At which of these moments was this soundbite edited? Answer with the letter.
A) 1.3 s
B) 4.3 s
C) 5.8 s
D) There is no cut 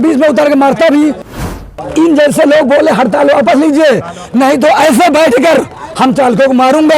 A